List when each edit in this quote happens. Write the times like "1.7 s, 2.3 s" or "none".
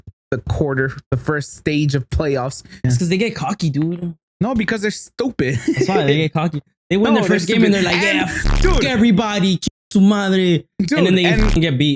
1.0 s, 2.7 s